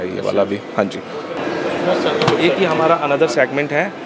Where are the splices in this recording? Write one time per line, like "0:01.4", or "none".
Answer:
0:01.4